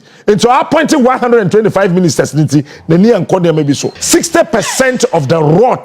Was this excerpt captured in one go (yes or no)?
no